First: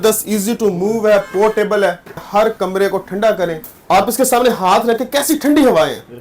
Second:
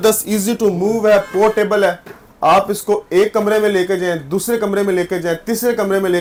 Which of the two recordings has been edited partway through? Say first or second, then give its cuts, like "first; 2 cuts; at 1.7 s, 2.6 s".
first; 2 cuts; at 2.2 s, 3.7 s